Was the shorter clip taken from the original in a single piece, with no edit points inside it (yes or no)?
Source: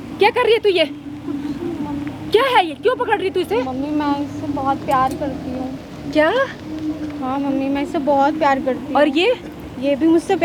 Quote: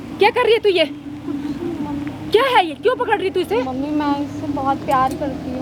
yes